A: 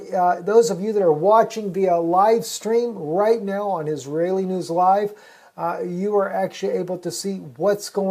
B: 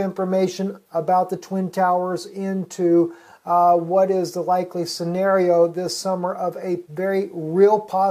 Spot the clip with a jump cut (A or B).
A